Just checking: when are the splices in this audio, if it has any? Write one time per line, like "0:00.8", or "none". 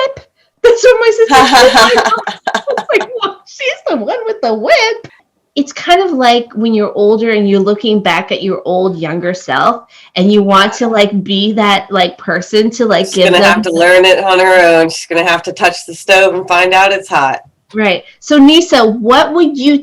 0:05.3